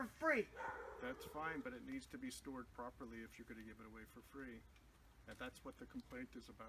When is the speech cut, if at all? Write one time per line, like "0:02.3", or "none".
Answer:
none